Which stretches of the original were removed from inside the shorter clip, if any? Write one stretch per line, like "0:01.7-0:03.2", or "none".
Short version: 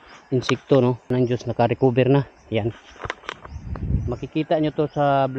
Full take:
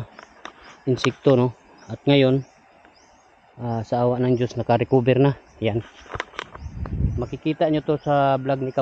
0:01.6-0:04.2